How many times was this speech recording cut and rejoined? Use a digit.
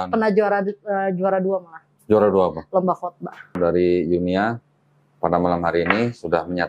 1